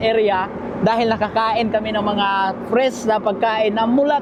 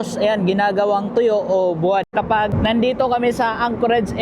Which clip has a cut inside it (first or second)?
second